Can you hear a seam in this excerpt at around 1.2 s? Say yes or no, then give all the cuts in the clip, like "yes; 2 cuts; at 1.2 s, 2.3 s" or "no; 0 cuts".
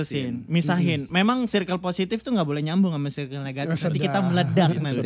no; 0 cuts